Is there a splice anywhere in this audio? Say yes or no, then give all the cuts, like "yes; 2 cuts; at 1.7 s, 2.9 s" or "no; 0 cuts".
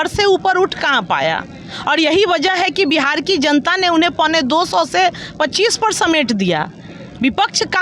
no; 0 cuts